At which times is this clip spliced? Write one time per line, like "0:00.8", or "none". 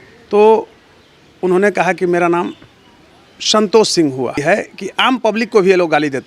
0:04.4